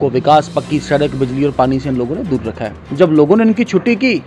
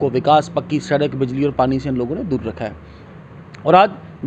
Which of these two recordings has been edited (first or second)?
first